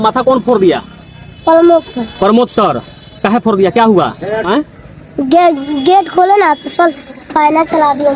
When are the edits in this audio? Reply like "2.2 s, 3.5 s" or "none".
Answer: 4.4 s